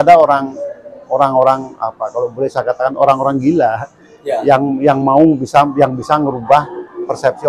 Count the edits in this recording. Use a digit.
0